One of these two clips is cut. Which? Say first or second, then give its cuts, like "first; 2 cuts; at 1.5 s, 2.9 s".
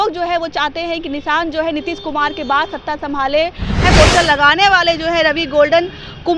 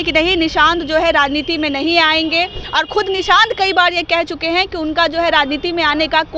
first; 1 cut; at 3.8 s